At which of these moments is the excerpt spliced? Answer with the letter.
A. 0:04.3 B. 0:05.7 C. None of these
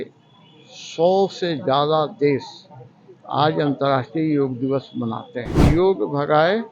B